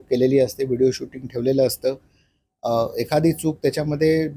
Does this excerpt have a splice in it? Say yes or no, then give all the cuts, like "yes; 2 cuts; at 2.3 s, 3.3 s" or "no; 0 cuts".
no; 0 cuts